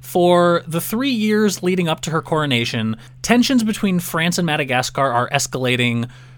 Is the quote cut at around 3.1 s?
yes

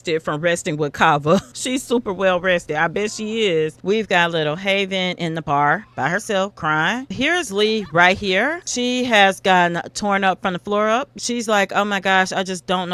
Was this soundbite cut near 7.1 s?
yes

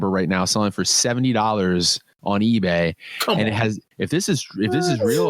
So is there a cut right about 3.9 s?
yes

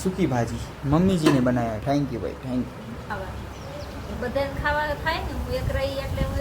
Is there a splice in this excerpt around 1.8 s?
no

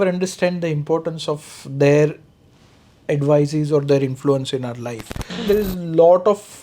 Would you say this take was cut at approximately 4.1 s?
no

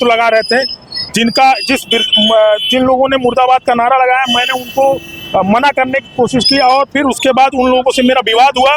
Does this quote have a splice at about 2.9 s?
no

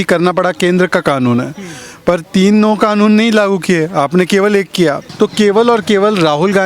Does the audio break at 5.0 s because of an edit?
yes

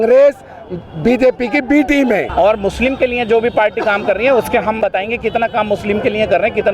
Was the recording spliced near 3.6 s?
no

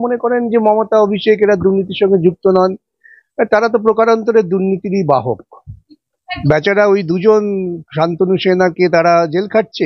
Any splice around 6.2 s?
yes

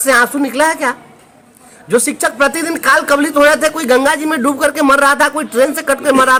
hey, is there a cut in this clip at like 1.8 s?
no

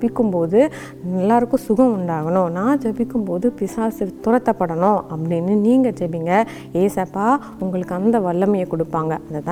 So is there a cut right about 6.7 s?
no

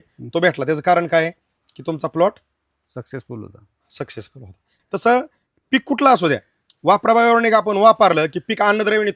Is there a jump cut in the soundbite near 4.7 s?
yes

